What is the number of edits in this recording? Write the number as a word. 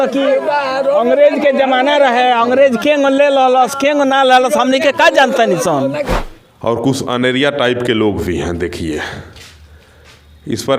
one